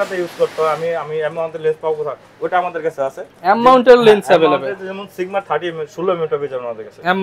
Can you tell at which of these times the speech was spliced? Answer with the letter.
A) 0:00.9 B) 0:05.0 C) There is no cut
C